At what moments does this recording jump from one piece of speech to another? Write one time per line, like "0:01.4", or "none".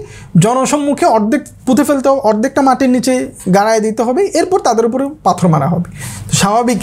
none